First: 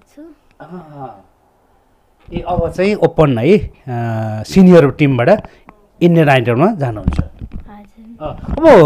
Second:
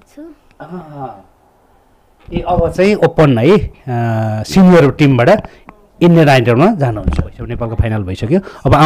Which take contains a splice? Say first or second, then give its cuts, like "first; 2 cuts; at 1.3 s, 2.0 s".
second; 1 cut; at 7.6 s